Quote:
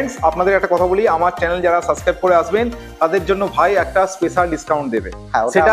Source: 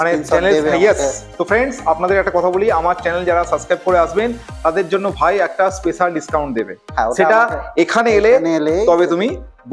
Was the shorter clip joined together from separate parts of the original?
no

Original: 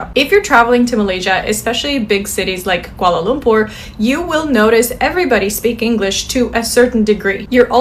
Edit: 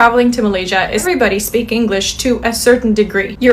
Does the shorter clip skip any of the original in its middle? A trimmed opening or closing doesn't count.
yes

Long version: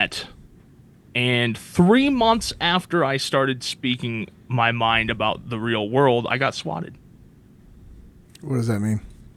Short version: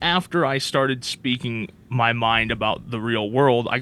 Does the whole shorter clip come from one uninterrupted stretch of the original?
yes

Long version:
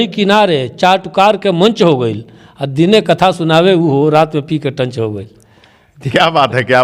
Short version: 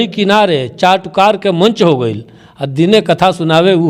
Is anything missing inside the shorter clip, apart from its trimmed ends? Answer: no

